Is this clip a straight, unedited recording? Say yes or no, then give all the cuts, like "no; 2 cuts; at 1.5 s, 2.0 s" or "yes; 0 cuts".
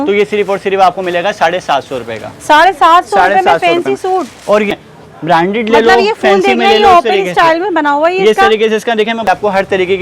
no; 2 cuts; at 4.7 s, 9.3 s